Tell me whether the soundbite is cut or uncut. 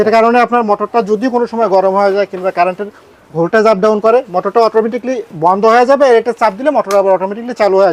uncut